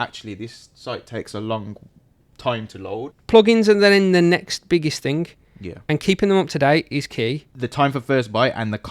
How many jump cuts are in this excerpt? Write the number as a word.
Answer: two